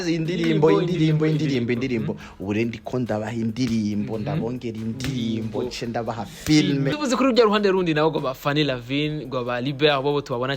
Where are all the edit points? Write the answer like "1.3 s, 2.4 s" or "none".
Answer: 6.9 s